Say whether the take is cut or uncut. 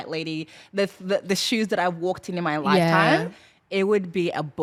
uncut